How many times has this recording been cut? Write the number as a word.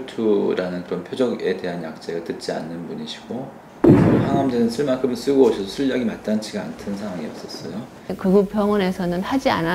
one